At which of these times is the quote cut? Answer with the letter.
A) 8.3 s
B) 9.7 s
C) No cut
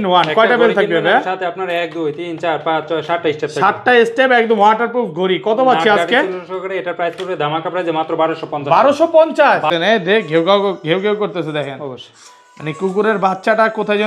B